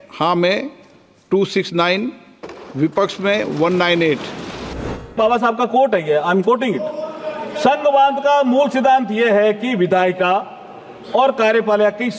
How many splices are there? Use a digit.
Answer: 1